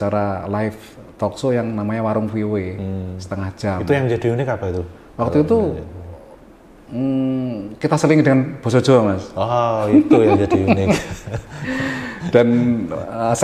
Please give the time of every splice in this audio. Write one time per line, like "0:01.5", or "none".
none